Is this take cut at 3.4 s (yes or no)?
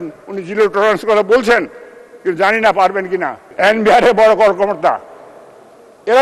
yes